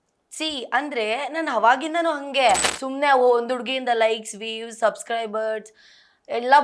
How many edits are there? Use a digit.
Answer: 1